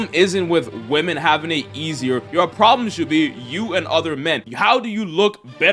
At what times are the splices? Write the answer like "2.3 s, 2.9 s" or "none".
2.3 s